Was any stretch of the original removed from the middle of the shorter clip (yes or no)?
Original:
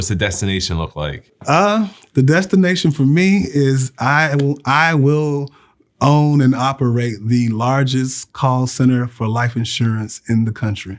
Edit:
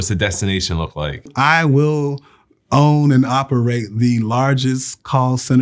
yes